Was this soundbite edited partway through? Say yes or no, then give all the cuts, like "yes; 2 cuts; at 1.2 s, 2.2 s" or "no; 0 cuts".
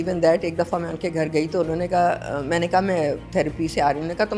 no; 0 cuts